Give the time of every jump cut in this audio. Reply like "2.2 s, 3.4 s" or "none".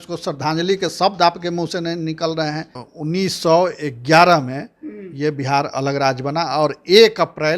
2.8 s